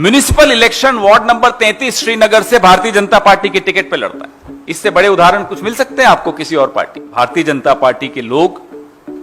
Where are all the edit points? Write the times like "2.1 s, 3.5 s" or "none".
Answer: 7.1 s

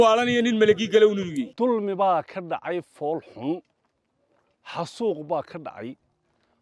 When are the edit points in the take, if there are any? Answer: 1.4 s

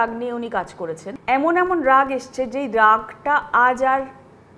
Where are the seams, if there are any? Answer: 1.1 s

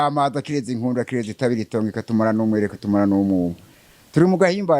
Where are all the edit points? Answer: none

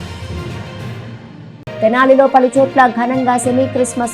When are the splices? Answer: 1.1 s

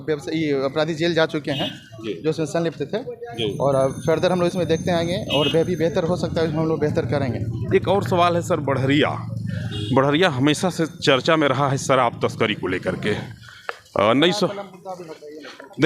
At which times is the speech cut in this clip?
none

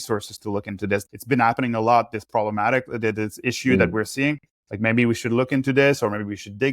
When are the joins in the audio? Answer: 1.0 s

